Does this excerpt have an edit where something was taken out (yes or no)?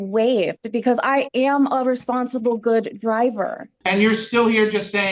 yes